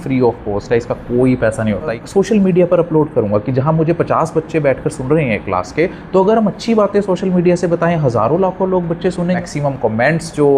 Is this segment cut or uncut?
cut